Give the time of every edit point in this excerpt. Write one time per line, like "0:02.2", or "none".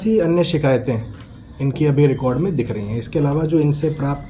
none